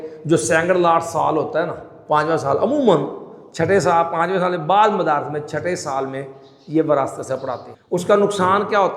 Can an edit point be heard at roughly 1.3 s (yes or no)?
no